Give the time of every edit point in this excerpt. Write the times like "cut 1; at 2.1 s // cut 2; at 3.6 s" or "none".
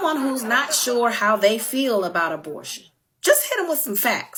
none